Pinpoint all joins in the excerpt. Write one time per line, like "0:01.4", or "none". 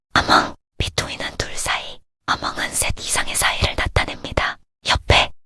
none